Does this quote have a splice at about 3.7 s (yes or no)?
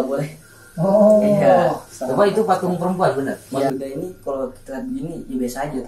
yes